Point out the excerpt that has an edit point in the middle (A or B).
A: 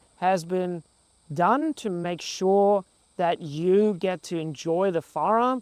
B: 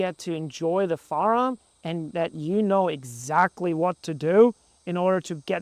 A